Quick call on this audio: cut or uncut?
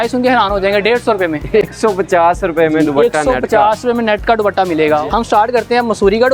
uncut